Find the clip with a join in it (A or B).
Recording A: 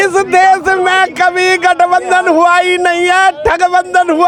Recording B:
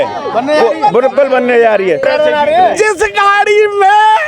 B